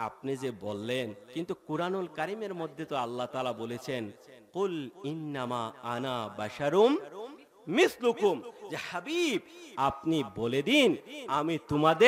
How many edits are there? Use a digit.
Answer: 1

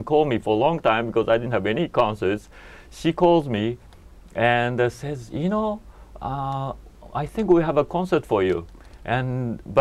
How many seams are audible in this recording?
0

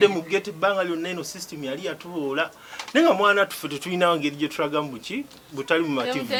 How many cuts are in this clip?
0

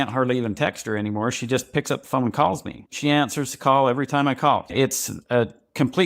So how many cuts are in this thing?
2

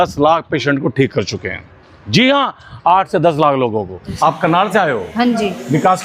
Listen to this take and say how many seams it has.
1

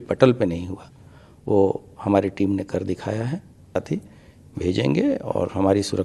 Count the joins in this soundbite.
1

